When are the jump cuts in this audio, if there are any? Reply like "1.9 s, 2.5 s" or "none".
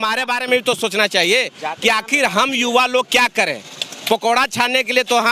none